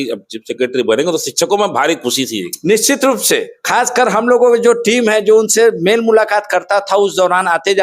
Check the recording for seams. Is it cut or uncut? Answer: uncut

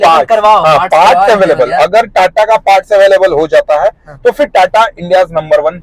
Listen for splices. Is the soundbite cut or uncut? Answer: uncut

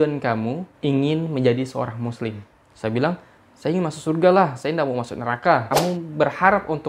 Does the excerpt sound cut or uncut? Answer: cut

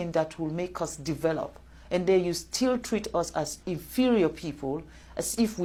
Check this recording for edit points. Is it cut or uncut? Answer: uncut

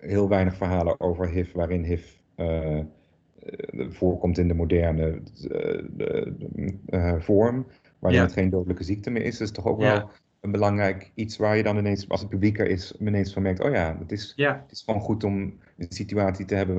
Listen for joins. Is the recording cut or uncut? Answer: uncut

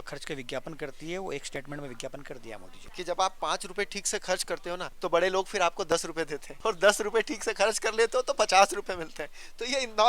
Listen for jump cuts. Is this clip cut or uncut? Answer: cut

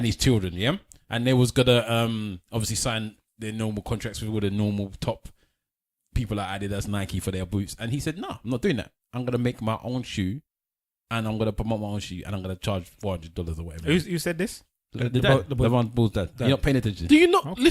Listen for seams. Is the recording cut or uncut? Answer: cut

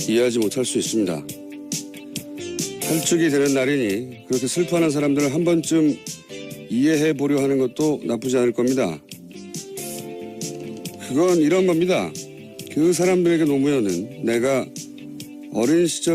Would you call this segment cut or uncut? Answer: uncut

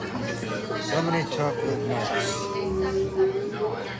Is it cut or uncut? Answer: uncut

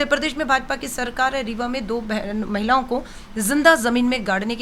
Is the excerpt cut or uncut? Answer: uncut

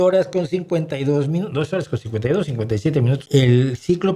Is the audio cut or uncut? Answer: cut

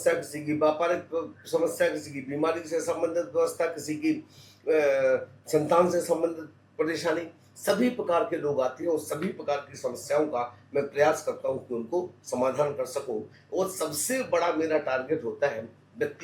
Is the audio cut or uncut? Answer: uncut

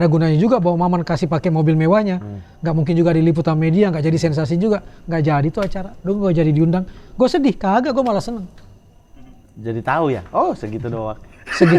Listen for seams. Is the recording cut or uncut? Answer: uncut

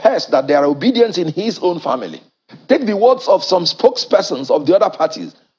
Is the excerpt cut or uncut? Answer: uncut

